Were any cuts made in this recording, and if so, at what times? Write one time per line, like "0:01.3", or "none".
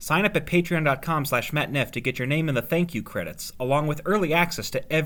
none